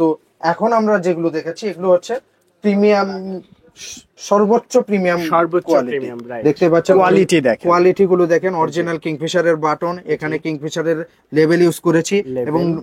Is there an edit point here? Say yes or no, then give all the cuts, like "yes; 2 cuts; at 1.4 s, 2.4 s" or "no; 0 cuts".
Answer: yes; 1 cut; at 6.2 s